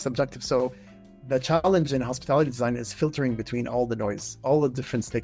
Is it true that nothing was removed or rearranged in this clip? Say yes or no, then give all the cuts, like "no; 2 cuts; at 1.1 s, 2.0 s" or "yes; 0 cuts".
yes; 0 cuts